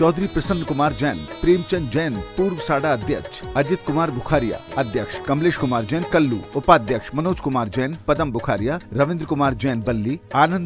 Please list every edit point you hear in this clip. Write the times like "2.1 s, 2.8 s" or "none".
5.1 s, 6.4 s